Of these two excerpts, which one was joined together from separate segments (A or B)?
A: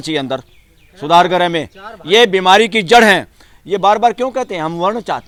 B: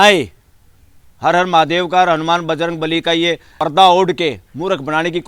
B